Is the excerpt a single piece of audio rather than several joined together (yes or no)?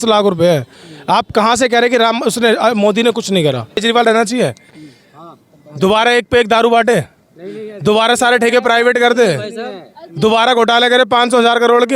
no